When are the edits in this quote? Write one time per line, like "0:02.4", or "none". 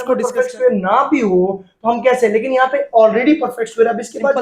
none